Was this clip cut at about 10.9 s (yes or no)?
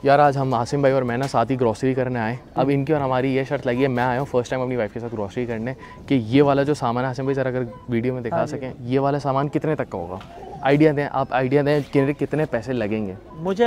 no